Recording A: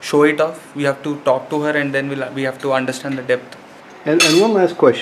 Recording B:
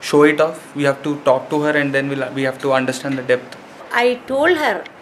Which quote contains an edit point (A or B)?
B